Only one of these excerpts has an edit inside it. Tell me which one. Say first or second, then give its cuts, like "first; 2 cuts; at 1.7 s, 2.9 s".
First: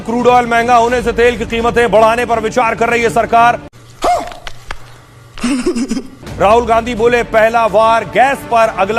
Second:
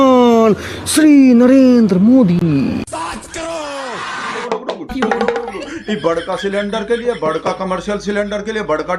second; 1 cut; at 4.4 s